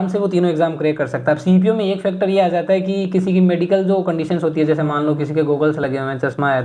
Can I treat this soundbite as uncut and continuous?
yes; 0 cuts

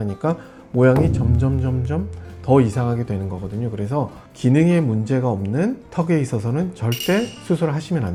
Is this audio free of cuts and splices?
yes; 0 cuts

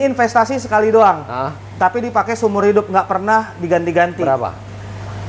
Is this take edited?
no; 0 cuts

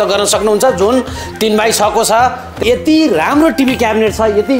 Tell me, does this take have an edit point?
yes; 1 cut; at 2.5 s

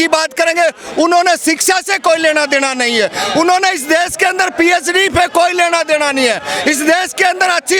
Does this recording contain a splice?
no; 0 cuts

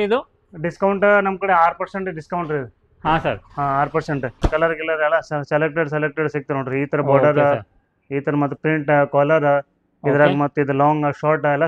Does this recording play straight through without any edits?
no; 1 cut; at 4.4 s

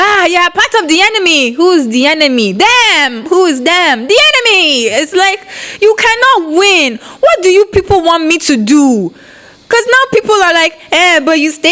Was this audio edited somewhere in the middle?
no; 0 cuts

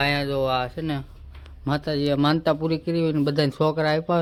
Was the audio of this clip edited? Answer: no; 0 cuts

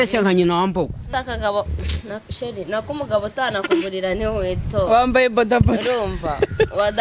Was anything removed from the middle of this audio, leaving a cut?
yes; 1 cut; at 1.0 s

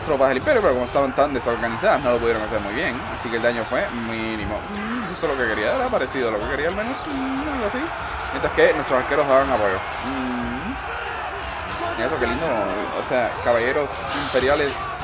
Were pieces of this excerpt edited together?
no; 0 cuts

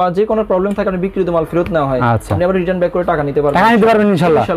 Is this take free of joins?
yes; 0 cuts

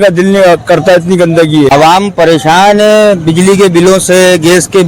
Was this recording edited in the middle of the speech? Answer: yes; 1 cut; at 1.7 s

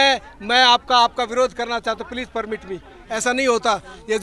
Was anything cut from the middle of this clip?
no; 0 cuts

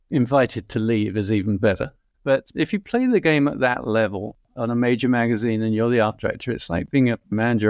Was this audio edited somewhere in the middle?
yes; 1 cut; at 2.4 s

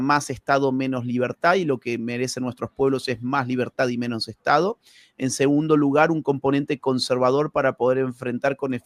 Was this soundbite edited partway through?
no; 0 cuts

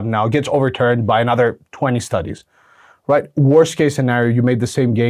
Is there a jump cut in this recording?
no; 0 cuts

